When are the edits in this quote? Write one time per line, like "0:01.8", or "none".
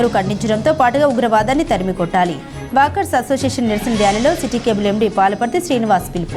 none